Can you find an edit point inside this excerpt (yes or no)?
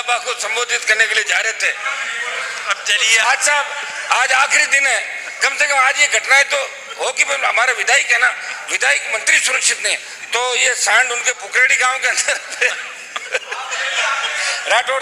yes